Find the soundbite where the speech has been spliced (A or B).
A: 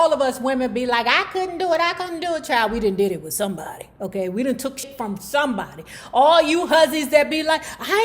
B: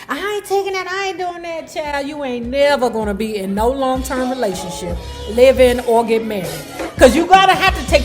A